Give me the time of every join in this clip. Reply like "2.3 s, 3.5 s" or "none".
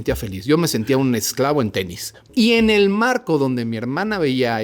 2.2 s